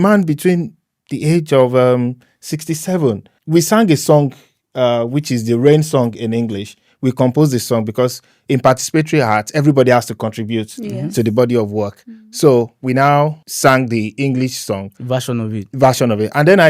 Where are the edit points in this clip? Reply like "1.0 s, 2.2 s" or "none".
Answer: 3.3 s, 13.5 s